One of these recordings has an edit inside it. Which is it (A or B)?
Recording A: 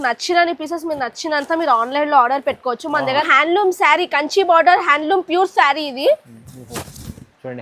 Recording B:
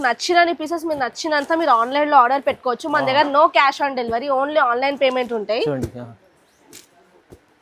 A